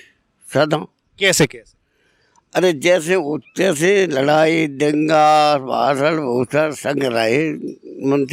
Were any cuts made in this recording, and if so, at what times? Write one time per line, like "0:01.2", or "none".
none